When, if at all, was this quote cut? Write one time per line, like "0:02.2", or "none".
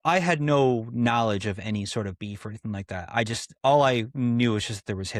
none